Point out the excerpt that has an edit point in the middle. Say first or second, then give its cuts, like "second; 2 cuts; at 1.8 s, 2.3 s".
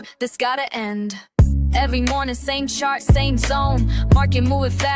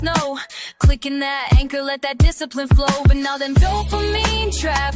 first; 1 cut; at 2.3 s